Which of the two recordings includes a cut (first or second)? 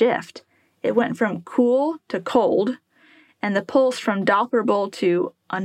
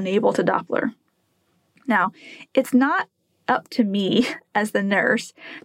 second